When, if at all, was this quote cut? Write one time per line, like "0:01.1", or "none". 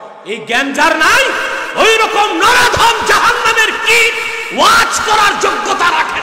none